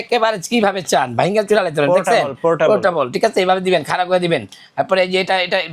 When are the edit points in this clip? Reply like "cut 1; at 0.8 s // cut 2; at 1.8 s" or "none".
none